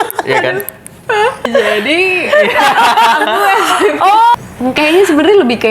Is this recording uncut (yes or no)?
no